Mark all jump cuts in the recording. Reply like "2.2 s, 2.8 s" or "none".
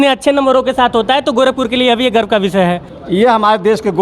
2.9 s